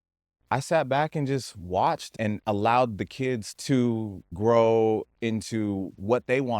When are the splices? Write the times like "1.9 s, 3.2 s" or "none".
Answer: 3.5 s